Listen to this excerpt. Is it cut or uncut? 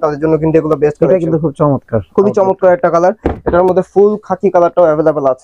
uncut